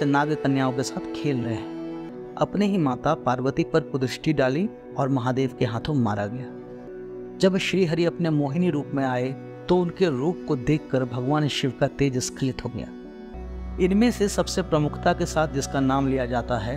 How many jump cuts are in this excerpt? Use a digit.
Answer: 3